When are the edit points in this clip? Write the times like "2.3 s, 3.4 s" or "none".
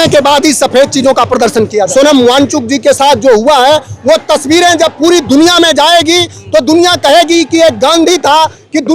1.7 s